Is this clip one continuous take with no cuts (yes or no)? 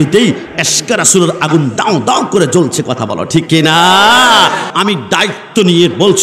no